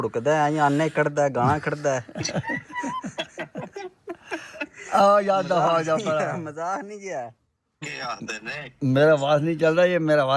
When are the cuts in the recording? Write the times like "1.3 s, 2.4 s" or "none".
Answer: 7.9 s